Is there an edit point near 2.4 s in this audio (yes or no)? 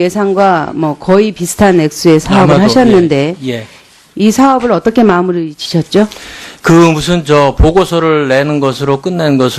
yes